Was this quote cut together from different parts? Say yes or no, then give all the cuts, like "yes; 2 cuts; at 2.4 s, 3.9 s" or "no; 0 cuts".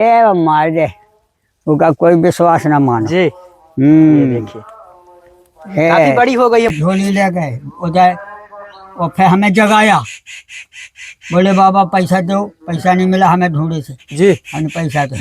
yes; 1 cut; at 6.7 s